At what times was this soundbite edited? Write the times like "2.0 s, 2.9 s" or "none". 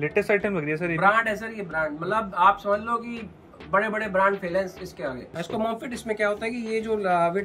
5.4 s